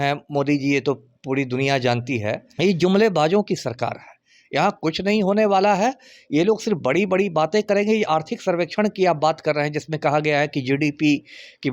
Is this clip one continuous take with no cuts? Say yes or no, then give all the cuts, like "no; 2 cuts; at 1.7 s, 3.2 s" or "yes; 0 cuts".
no; 1 cut; at 2.5 s